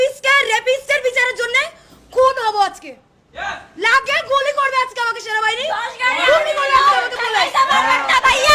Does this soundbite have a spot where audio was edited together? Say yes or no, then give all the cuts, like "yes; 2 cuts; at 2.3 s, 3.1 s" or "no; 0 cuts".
no; 0 cuts